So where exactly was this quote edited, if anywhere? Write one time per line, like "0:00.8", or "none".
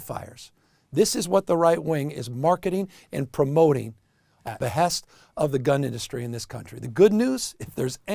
none